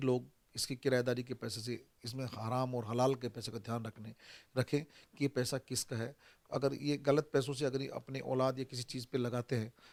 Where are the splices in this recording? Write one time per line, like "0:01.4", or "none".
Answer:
none